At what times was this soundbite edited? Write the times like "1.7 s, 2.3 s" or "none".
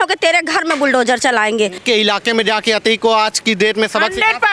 1.8 s